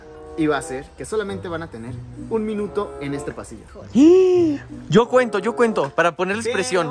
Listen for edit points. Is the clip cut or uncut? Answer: uncut